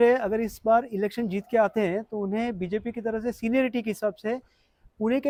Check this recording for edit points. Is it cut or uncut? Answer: uncut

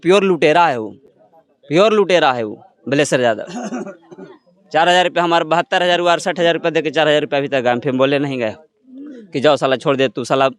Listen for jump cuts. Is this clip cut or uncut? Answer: uncut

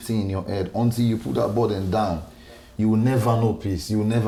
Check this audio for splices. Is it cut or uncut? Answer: uncut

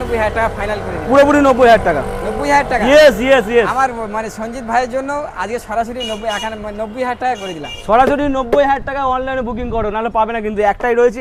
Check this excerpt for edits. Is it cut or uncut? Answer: uncut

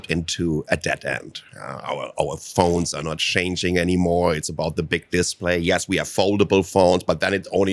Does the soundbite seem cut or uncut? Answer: uncut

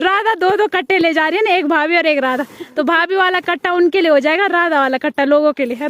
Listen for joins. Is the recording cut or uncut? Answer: uncut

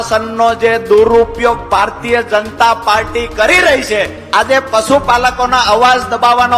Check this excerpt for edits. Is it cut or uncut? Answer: cut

